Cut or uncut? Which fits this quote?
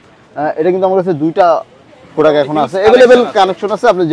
uncut